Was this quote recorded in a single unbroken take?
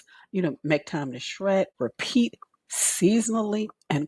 no; 1 cut; at 1.7 s

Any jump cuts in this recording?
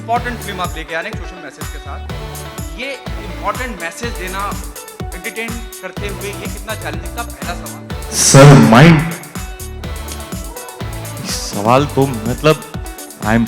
yes; 2 cuts; at 9.2 s, 11.6 s

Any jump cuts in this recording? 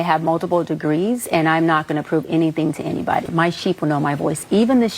yes; 1 cut; at 3.3 s

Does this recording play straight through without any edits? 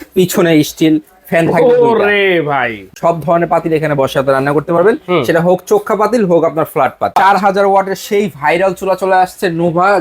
no; 2 cuts; at 2.8 s, 7.1 s

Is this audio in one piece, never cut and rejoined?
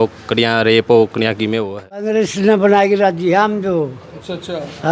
no; 1 cut; at 2.1 s

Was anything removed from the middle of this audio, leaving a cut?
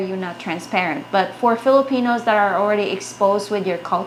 no; 0 cuts

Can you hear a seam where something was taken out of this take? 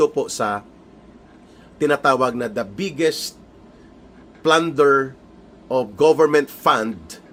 no; 0 cuts

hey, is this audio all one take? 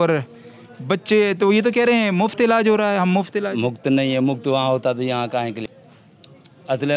yes; 0 cuts

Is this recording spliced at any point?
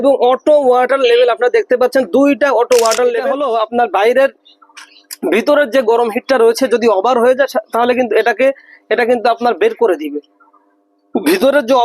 yes; 1 cut; at 3.3 s

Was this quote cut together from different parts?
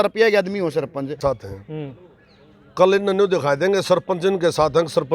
yes; 1 cut; at 1.2 s

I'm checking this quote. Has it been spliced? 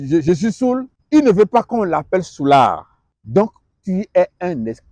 yes; 1 cut; at 0.9 s

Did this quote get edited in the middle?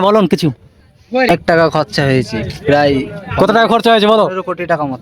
yes; 1 cut; at 1.3 s

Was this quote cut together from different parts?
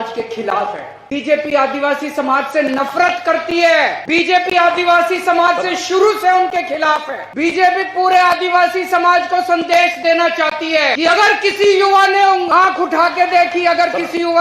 yes; 5 cuts; at 1.0 s, 4.0 s, 7.2 s, 10.9 s, 12.5 s

